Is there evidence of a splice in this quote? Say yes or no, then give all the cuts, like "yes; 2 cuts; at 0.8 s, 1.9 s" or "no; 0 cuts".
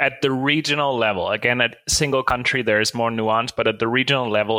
no; 0 cuts